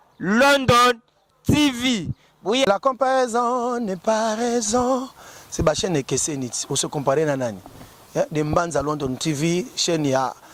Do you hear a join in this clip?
no; 0 cuts

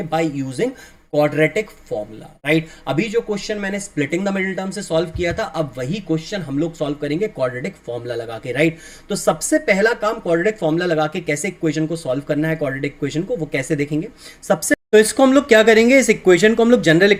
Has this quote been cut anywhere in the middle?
no; 0 cuts

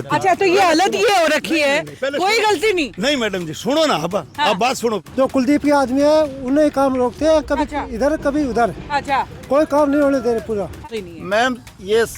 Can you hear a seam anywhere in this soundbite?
yes; 2 cuts; at 5.0 s, 10.9 s

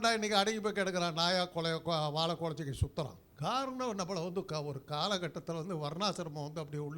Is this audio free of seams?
no; 1 cut; at 3.2 s

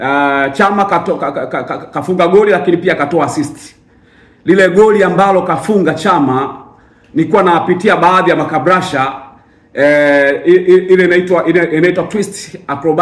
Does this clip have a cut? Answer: no; 0 cuts

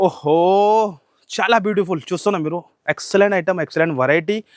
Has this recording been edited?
no; 0 cuts

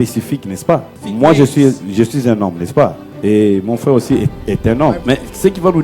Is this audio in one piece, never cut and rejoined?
no; 3 cuts; at 1.0 s, 3.1 s, 5.0 s

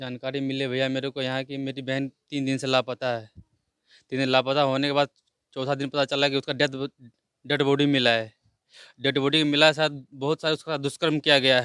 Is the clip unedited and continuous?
yes; 0 cuts

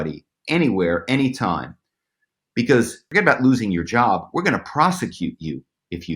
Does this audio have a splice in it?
yes; 1 cut; at 3.1 s

